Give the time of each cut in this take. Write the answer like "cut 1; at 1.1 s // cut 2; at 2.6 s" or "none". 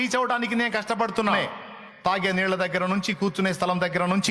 cut 1; at 1.3 s